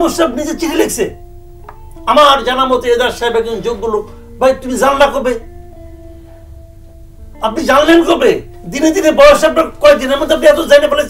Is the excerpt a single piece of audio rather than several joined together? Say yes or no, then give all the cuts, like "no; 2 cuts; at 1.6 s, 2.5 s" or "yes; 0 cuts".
yes; 0 cuts